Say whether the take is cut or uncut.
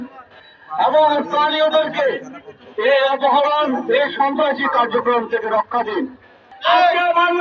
cut